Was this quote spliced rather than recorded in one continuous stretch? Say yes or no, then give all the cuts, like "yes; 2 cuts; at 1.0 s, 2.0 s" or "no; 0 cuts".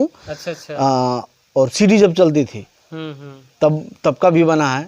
no; 0 cuts